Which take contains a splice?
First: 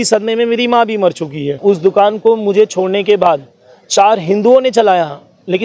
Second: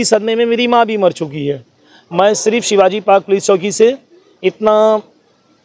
first; 1 cut; at 1.6 s

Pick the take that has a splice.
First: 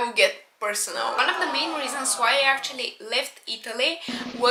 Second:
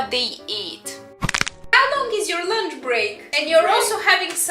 second; 2 cuts; at 1.1 s, 3.3 s

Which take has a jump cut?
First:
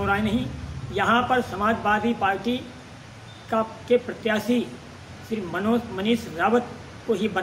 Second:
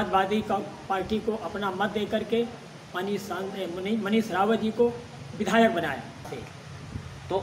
second; 1 cut; at 6.3 s

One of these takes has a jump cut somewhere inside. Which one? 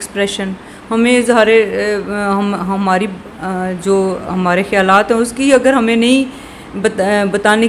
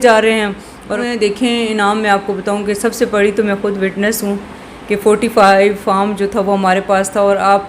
second; 1 cut; at 1.0 s

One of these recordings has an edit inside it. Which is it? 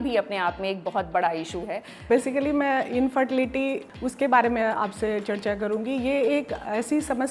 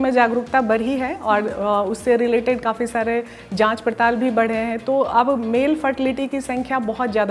first; 2 cuts; at 2.1 s, 3.9 s

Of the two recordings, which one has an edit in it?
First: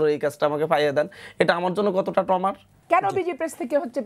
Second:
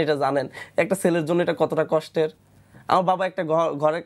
first; 1 cut; at 2.7 s

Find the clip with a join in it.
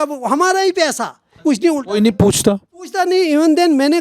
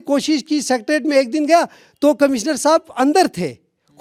first; 1 cut; at 1.4 s

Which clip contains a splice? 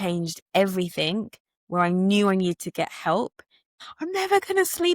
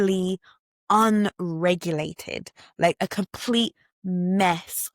first; 1 cut; at 3.7 s

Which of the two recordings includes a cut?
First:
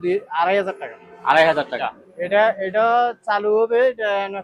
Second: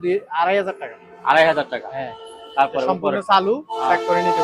first; 1 cut; at 1.8 s

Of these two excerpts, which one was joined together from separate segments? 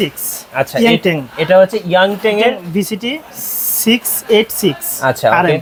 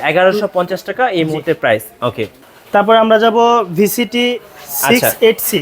second; 1 cut; at 2.4 s

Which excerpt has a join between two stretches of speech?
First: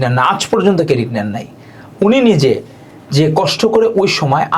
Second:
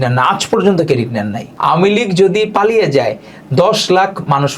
second; 1 cut; at 1.5 s

